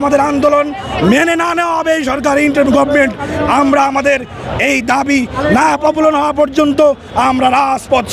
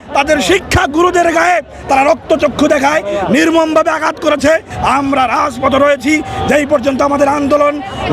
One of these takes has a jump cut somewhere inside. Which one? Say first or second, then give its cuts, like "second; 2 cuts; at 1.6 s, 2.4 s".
second; 1 cut; at 4.7 s